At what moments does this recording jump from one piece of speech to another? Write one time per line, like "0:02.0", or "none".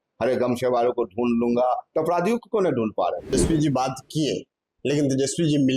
0:03.3